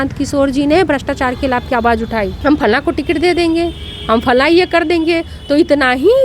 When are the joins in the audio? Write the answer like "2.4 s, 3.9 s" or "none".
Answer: 2.4 s